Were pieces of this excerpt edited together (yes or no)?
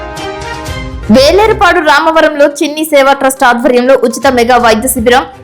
yes